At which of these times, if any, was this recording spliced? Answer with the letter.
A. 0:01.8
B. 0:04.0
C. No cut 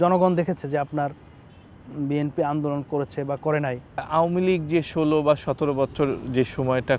B